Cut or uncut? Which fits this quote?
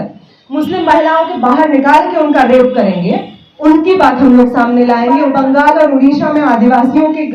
cut